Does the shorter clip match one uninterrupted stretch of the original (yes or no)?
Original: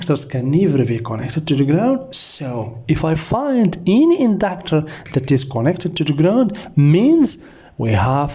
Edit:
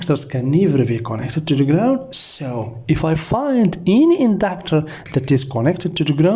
yes